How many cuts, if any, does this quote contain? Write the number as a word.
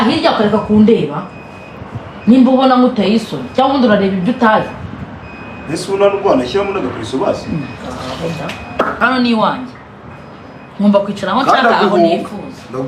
one